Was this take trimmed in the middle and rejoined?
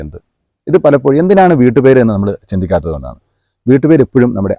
no; 0 cuts

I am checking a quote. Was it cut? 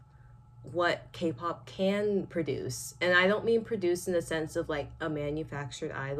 no; 0 cuts

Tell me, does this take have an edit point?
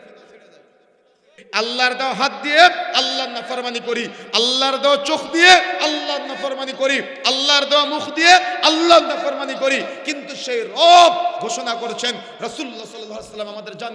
yes; 1 cut; at 1.4 s

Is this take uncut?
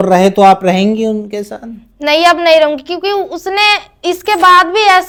yes; 0 cuts

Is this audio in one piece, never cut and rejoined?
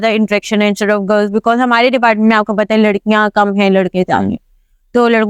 yes; 0 cuts

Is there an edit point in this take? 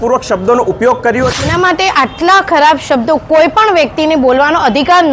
yes; 1 cut; at 1.4 s

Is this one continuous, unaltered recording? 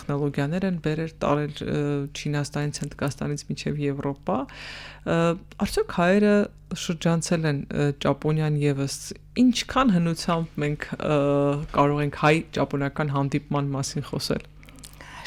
yes; 0 cuts

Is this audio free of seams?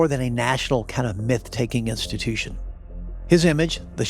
yes; 0 cuts

